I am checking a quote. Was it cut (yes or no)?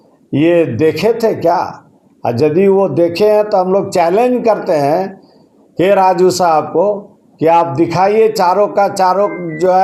no